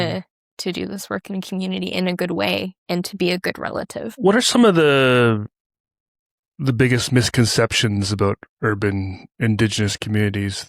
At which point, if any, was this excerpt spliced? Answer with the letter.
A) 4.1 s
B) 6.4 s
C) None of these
A